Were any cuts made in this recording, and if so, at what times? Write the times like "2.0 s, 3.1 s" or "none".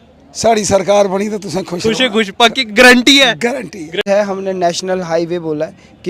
4.0 s

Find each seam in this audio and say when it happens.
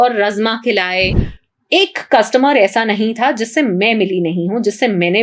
1.2 s

